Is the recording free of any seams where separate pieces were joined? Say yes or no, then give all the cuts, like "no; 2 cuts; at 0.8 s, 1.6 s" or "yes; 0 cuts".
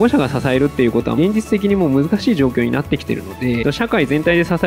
no; 2 cuts; at 1.1 s, 3.6 s